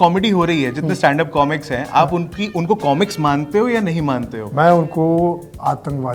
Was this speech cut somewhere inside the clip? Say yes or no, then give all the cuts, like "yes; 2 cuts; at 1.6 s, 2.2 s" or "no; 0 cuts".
no; 0 cuts